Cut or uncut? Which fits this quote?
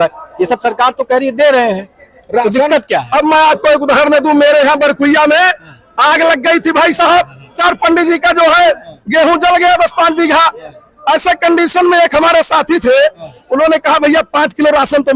cut